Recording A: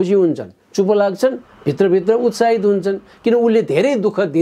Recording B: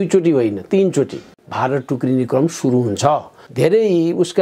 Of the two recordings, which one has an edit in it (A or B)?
B